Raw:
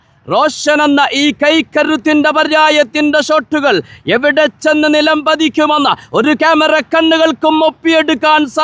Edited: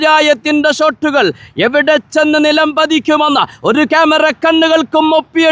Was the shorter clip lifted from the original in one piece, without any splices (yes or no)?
yes